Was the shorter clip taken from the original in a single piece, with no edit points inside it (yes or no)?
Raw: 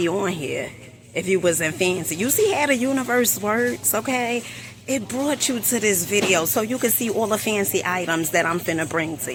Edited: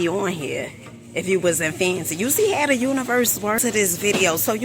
no